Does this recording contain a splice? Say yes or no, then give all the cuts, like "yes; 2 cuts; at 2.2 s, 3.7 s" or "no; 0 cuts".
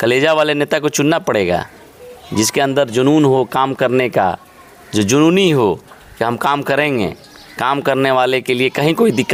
no; 0 cuts